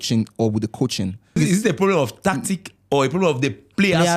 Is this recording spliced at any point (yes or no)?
yes